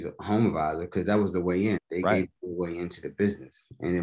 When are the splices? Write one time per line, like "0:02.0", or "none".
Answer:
0:01.8